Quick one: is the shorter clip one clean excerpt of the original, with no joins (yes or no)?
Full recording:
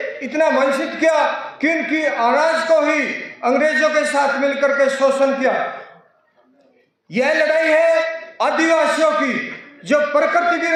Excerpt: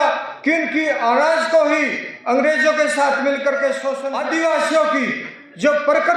no